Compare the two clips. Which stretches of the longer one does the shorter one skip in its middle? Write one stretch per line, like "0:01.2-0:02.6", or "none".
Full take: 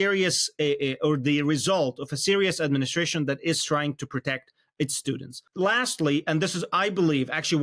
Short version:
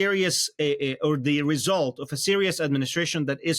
none